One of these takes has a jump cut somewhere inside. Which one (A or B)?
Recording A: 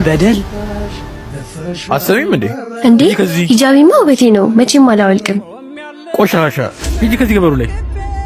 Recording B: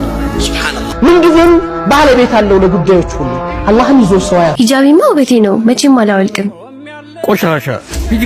B